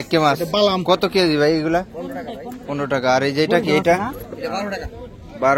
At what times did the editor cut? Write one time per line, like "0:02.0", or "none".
none

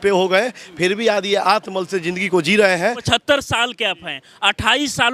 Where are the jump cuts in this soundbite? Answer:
0:03.0

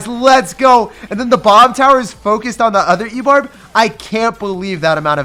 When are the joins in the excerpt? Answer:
none

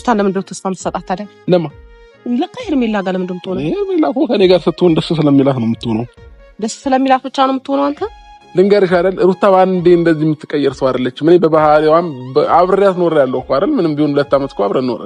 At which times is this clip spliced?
0:08.4

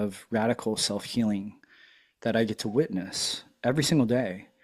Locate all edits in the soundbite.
none

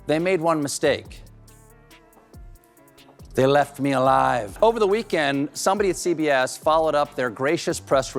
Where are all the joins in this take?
0:04.5

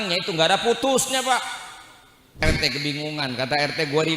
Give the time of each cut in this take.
0:02.4

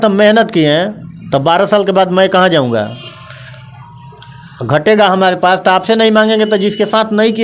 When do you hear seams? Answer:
none

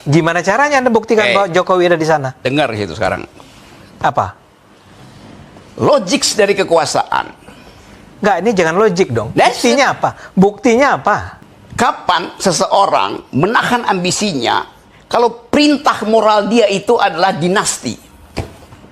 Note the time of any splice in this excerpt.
0:11.3

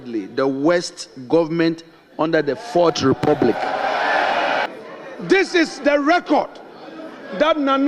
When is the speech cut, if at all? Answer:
0:04.7

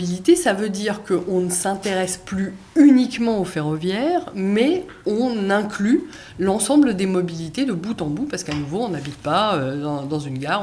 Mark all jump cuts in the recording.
none

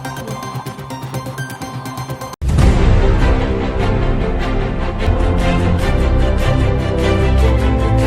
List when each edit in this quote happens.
none

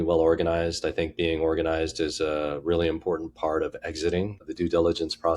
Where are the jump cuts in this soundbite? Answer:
0:04.4

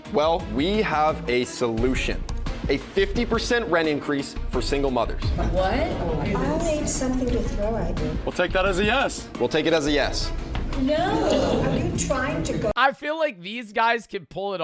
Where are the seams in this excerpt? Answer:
0:08.2

